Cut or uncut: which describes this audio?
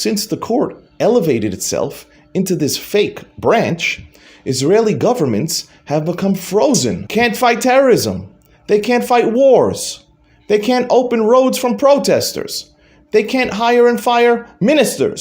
cut